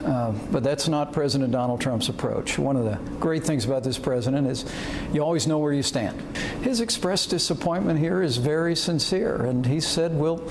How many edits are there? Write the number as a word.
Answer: one